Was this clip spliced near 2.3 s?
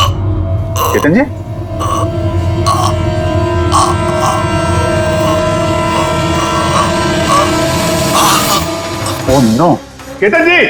no; 0 cuts

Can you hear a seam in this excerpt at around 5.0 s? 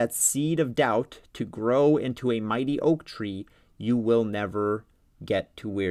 no; 0 cuts

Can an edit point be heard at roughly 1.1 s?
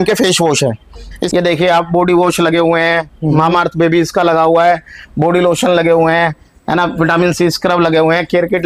yes; 1 cut; at 1.1 s

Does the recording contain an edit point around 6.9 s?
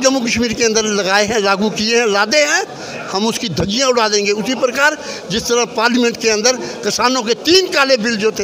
no; 0 cuts

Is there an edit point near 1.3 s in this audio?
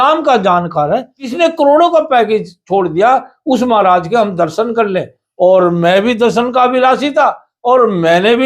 yes; 1 cut; at 1.3 s

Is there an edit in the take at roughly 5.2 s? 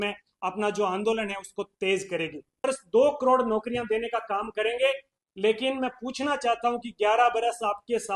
no; 1 cut; at 2.7 s

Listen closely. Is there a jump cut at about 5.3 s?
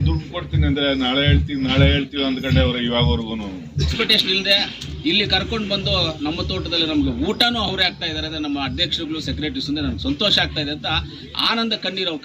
no; 1 cut; at 3.9 s

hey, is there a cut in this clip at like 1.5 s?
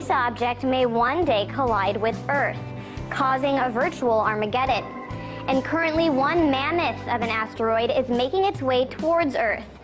yes; 1 cut; at 1.5 s

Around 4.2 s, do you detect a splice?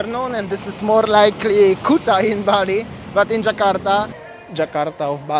yes; 1 cut; at 4.2 s

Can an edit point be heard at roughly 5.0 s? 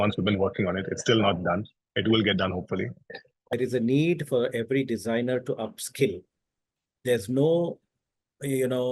no; 1 cut; at 3.5 s

